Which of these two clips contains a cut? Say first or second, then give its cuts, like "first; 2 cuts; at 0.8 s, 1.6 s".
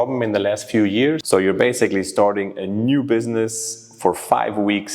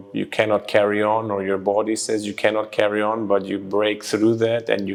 first; 1 cut; at 1.2 s